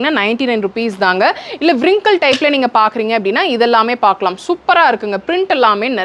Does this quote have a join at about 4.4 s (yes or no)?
no